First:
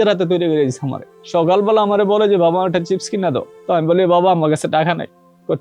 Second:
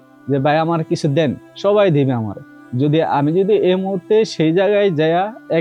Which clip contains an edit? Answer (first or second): first